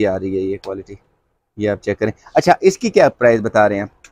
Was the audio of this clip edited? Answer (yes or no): no